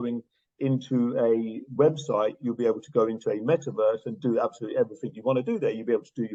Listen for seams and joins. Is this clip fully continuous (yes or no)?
yes